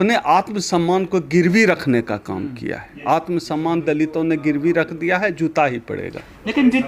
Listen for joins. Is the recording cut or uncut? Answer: uncut